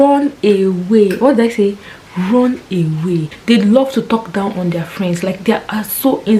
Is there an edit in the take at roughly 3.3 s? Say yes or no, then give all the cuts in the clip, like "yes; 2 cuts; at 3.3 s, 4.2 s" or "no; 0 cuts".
yes; 1 cut; at 3.3 s